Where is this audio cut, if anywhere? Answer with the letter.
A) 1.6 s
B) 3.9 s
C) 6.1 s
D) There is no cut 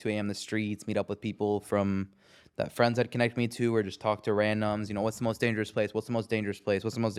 D